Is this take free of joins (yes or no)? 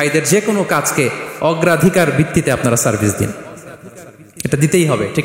yes